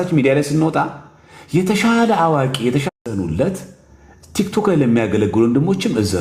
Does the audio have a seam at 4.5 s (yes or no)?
no